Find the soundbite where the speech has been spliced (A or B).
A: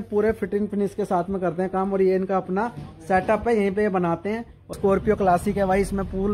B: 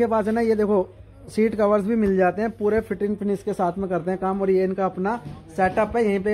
A